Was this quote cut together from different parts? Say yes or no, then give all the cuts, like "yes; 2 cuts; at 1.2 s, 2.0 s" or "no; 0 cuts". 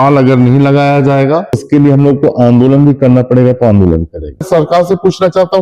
yes; 2 cuts; at 1.6 s, 4.5 s